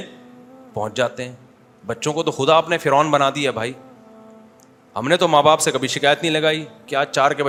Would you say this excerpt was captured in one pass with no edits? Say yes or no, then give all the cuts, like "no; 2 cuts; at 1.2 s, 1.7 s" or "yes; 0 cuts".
yes; 0 cuts